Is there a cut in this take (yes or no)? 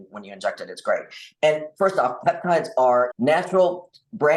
yes